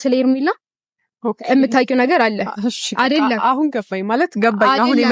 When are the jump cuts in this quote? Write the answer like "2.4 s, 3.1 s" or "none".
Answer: none